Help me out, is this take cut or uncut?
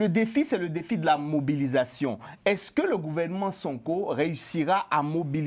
uncut